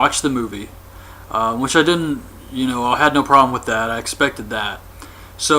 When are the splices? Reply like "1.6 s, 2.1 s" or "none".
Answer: 4.0 s